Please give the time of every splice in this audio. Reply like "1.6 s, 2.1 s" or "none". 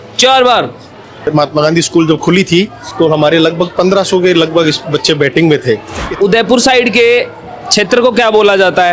1.3 s, 5.9 s